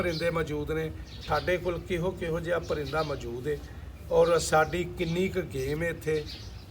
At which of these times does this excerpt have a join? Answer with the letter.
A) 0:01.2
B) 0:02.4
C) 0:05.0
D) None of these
A